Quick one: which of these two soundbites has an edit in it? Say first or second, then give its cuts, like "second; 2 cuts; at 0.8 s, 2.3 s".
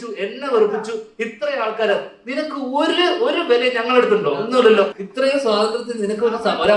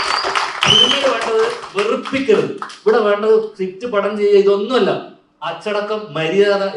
first; 1 cut; at 5.0 s